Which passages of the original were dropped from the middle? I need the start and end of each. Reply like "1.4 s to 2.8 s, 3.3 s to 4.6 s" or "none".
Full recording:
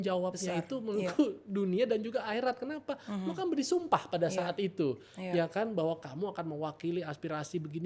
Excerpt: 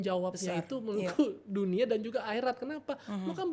none